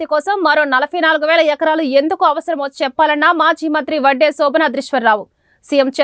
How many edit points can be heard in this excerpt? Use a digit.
0